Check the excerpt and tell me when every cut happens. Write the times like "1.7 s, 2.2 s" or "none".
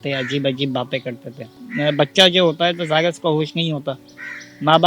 1.6 s